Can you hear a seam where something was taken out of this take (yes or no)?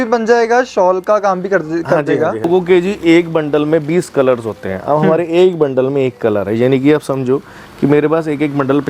yes